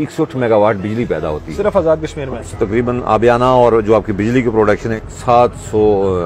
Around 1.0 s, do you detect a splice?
no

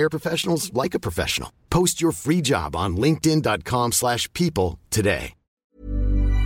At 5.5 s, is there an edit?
yes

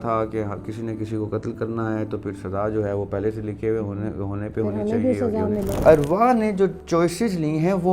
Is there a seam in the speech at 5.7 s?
yes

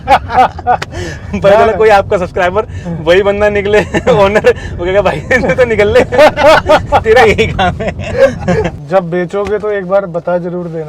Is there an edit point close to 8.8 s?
yes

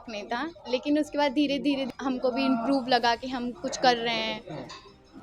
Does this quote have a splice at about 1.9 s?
yes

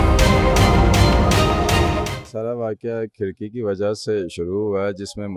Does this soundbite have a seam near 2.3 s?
yes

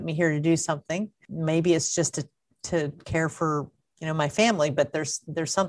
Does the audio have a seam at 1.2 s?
yes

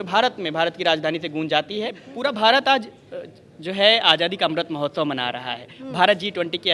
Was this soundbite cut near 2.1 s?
yes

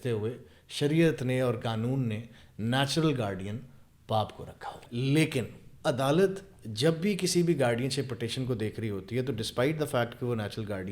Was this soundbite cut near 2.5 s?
no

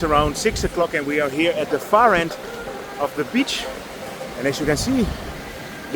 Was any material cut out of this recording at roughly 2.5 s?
no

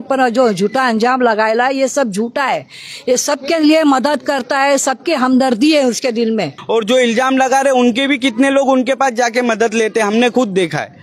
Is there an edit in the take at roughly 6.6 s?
yes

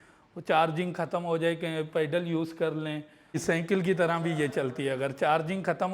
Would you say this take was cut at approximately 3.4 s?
yes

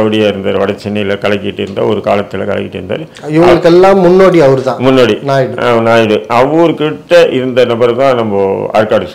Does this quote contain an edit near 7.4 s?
no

